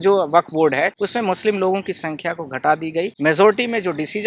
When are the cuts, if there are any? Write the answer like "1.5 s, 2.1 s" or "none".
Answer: 0.9 s, 3.1 s